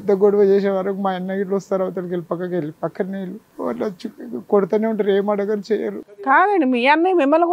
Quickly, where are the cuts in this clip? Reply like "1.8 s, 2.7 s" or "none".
3.4 s